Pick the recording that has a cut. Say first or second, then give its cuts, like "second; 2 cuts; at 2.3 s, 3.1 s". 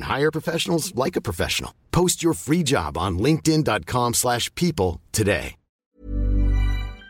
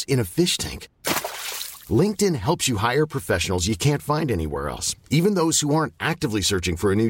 first; 1 cut; at 6.0 s